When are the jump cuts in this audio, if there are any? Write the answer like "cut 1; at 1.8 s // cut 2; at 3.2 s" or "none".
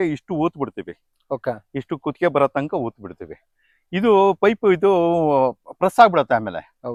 none

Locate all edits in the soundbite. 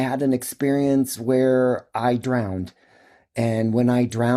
none

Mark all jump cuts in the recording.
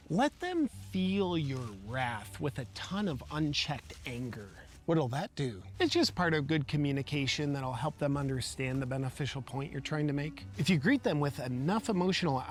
none

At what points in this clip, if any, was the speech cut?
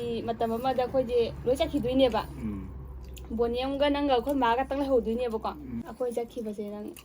cut 1; at 5.8 s

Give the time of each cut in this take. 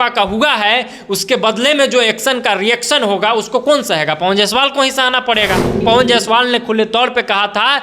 cut 1; at 5.8 s

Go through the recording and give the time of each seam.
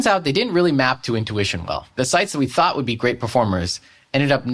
none

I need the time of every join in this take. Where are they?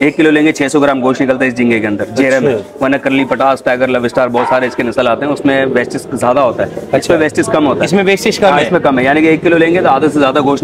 none

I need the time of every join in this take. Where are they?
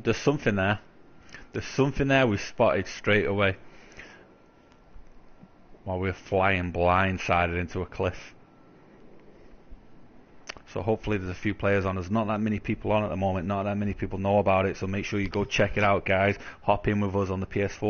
cut 1; at 8.7 s

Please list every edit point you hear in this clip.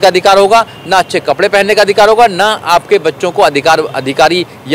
none

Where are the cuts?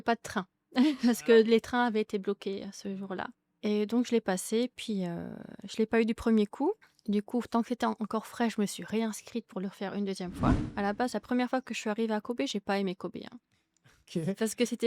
cut 1; at 3.4 s // cut 2; at 6.9 s // cut 3; at 10.6 s

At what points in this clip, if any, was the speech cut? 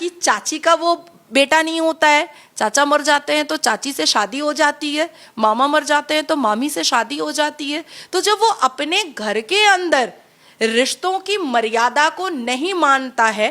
none

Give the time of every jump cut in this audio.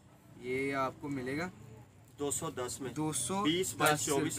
none

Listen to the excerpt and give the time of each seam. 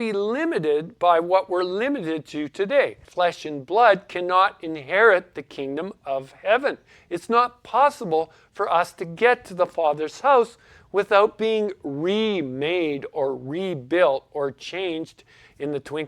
cut 1; at 3.0 s

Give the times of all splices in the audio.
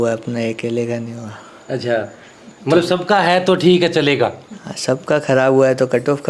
none

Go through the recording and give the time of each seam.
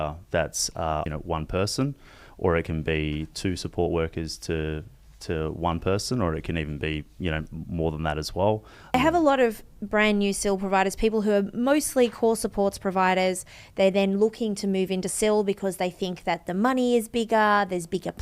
cut 1; at 1.1 s // cut 2; at 8.9 s

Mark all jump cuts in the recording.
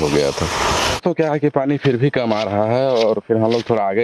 cut 1; at 0.9 s

